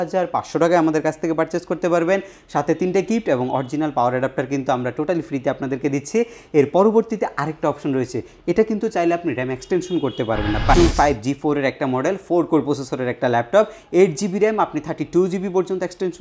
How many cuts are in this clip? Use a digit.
1